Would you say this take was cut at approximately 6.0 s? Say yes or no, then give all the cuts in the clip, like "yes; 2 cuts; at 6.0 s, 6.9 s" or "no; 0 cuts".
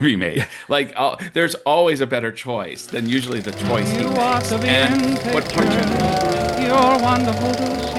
no; 1 cut; at 3.8 s